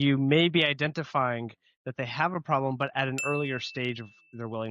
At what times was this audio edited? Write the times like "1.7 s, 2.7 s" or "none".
none